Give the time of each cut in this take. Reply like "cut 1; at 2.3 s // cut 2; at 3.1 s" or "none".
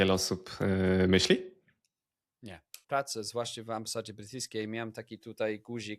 cut 1; at 2.8 s

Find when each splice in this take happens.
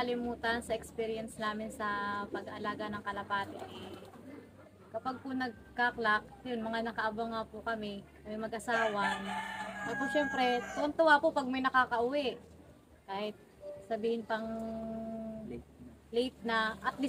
none

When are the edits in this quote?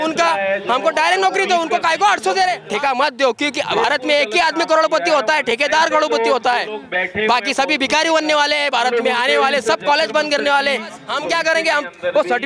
cut 1; at 2.6 s // cut 2; at 11.0 s

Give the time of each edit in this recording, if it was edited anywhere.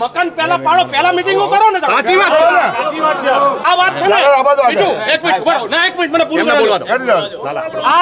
cut 1; at 3.6 s

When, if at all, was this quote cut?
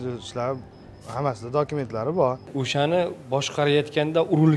cut 1; at 2.4 s

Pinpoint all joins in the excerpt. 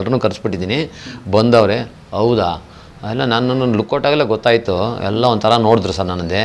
none

